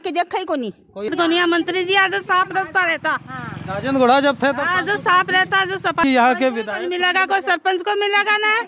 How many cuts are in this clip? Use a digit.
2